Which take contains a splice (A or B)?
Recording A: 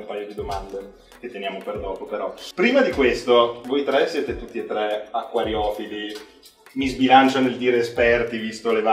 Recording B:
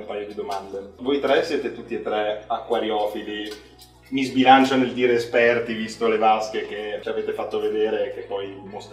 B